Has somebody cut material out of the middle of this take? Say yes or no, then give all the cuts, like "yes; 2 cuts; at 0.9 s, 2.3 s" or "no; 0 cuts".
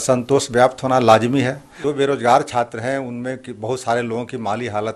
yes; 1 cut; at 1.8 s